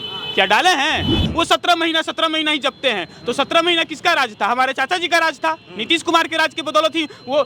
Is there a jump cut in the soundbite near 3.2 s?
no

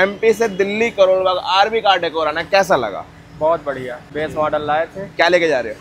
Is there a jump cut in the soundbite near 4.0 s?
yes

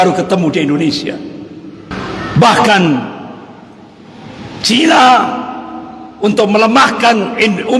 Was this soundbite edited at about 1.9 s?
yes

